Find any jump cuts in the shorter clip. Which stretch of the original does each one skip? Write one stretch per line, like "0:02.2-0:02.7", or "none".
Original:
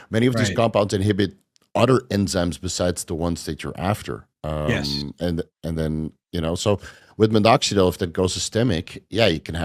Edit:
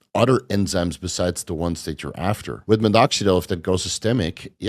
0:04.1-0:07.0